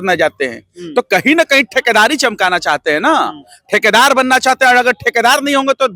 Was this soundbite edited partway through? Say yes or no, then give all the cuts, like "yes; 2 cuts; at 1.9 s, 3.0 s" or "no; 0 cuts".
no; 0 cuts